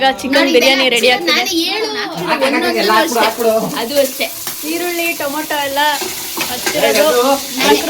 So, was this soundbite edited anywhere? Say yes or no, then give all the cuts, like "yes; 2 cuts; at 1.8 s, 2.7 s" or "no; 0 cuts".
yes; 1 cut; at 2.0 s